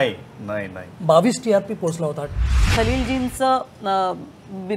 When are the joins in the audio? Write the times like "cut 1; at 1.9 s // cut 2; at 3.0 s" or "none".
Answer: cut 1; at 2.6 s